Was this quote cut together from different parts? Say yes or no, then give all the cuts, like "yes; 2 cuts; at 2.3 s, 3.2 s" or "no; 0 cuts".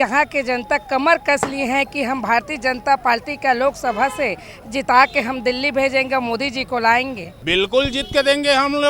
yes; 1 cut; at 7.3 s